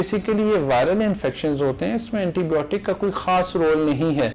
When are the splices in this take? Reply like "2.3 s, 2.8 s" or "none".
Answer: none